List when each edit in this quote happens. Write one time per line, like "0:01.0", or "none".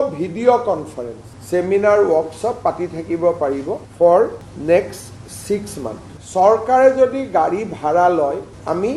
0:03.8